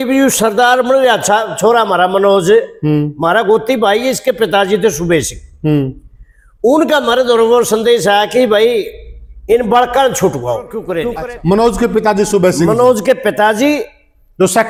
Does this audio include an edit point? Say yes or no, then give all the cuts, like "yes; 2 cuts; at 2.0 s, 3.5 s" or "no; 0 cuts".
no; 0 cuts